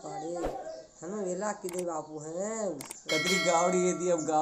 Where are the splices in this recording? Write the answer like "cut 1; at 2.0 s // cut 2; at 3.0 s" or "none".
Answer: cut 1; at 2.9 s

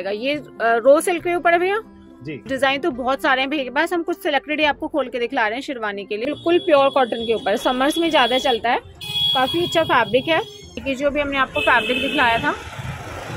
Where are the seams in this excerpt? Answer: cut 1; at 2.5 s // cut 2; at 6.2 s // cut 3; at 10.8 s

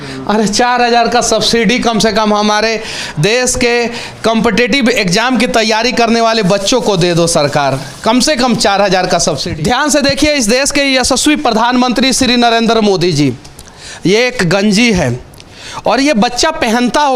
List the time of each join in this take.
cut 1; at 9.5 s

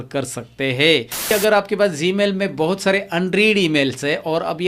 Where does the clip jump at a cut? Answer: cut 1; at 1.3 s

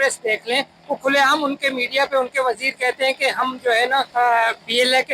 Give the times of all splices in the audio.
cut 1; at 4.1 s

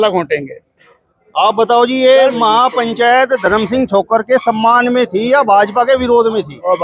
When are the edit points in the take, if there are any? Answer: none

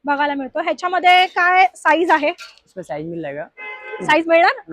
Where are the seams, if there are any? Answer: none

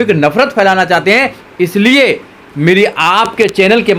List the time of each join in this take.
none

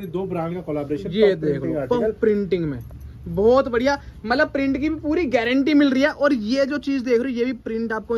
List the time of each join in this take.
none

